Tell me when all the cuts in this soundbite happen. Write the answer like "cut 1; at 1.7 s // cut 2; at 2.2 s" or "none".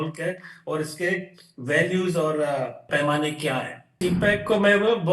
cut 1; at 2.9 s // cut 2; at 4.0 s